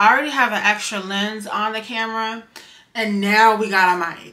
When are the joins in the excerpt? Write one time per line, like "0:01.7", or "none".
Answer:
none